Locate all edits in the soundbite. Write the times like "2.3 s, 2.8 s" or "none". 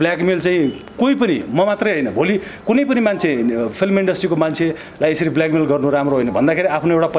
none